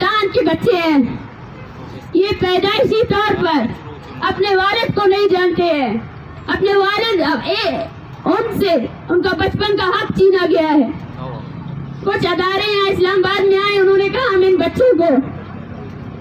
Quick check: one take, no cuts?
yes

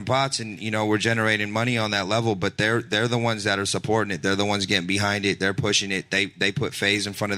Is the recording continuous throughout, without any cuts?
yes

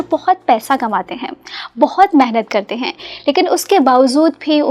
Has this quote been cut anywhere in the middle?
no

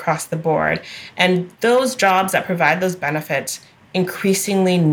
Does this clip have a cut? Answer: no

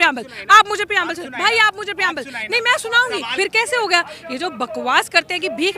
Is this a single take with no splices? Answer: no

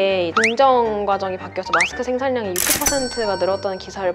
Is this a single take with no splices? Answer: yes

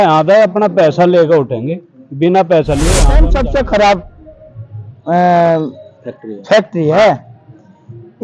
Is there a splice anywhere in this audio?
yes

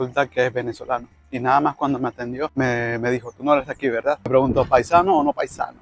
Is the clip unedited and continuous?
no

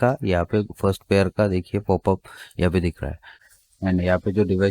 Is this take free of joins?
no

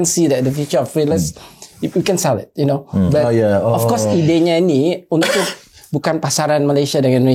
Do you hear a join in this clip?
no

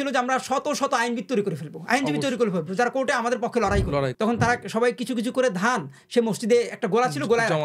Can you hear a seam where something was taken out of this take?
yes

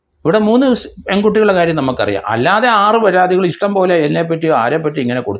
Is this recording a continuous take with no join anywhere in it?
yes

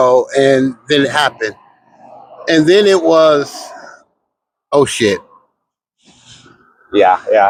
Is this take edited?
no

